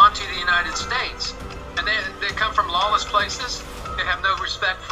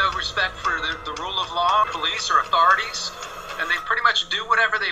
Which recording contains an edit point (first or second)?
second